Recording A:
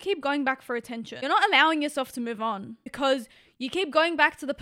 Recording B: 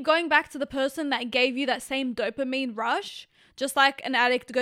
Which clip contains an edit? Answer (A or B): A